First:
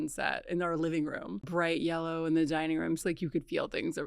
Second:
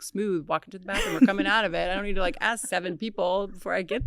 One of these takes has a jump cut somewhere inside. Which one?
first; 2 cuts; at 1.5 s, 3.0 s

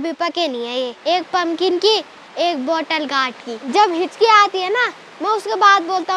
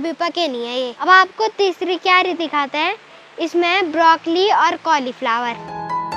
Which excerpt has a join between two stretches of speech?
first; 2 cuts; at 0.9 s, 3.7 s

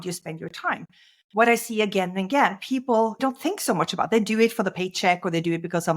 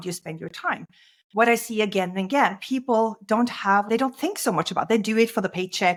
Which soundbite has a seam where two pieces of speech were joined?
first; 1 cut; at 3.2 s

